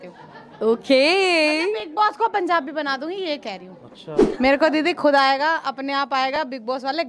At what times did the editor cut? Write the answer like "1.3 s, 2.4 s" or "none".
4.2 s